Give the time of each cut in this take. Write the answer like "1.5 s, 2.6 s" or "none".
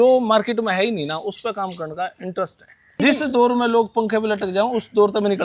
3.0 s